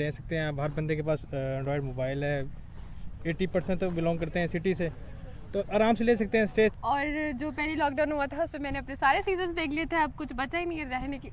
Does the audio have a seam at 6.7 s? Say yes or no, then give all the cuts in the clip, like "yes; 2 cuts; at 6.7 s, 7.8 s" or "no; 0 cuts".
yes; 1 cut; at 6.7 s